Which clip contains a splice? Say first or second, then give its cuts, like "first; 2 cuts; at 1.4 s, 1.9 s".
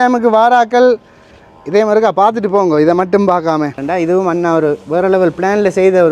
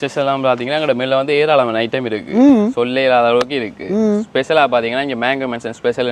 first; 1 cut; at 3.8 s